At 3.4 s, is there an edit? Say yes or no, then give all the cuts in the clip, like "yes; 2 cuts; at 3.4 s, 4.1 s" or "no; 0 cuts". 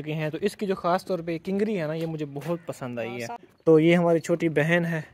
yes; 1 cut; at 3.4 s